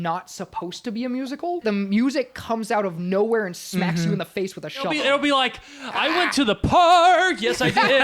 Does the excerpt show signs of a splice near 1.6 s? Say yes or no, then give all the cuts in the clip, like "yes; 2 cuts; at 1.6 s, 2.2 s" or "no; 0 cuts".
yes; 2 cuts; at 1.6 s, 4.9 s